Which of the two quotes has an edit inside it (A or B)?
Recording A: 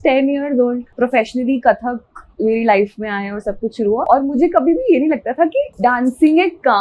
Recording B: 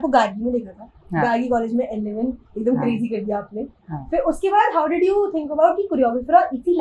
A